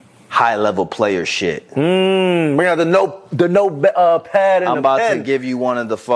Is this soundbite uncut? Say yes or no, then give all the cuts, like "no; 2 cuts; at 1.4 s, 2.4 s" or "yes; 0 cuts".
yes; 0 cuts